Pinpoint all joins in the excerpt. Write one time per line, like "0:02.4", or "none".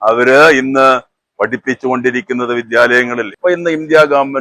0:03.3